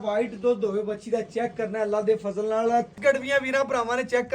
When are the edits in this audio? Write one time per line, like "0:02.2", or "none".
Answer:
0:02.9